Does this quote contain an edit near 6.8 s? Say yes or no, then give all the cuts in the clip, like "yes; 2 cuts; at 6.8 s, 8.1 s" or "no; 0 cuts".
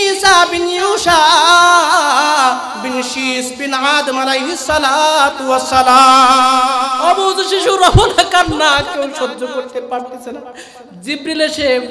yes; 1 cut; at 6.8 s